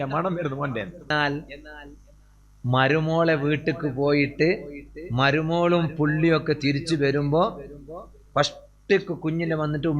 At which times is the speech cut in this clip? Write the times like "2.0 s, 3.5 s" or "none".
1.1 s